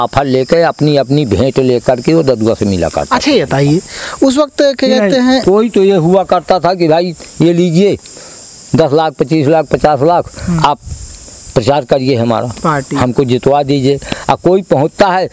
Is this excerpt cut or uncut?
uncut